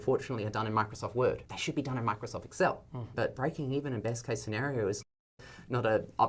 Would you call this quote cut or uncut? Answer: cut